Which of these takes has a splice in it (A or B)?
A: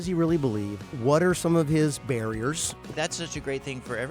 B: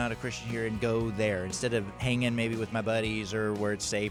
A